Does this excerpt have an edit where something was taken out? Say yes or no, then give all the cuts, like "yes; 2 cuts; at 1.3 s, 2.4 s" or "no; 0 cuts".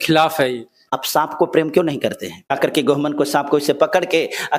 yes; 2 cuts; at 1.0 s, 2.5 s